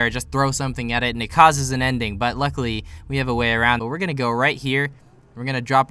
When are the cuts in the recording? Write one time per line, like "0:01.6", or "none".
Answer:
0:03.8